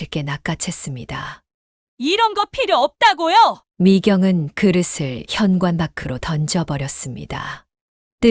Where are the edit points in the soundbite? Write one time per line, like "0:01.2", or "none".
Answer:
none